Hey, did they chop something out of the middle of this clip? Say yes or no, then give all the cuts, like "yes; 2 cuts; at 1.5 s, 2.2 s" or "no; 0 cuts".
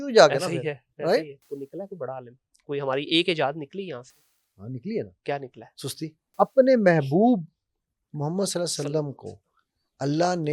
yes; 2 cuts; at 1.4 s, 6.2 s